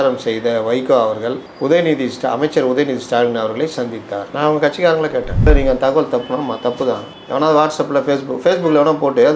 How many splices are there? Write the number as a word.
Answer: one